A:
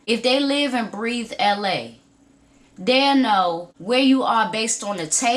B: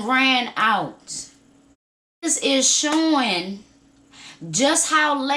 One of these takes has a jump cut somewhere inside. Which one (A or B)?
B